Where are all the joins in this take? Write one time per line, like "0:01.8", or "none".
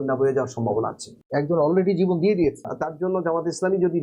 0:01.2
0:02.6